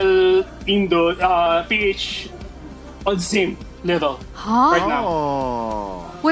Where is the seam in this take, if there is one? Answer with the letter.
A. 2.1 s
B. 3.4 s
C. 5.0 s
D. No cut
D